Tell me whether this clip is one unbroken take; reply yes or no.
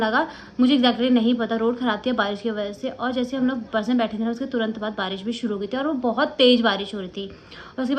yes